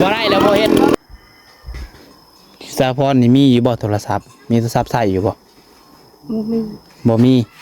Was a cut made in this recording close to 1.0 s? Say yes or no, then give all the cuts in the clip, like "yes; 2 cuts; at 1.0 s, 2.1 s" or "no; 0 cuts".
yes; 1 cut; at 1.0 s